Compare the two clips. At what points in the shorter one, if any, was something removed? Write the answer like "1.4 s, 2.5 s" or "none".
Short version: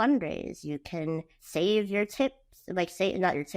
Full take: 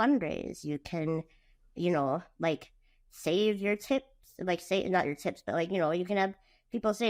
1.3 s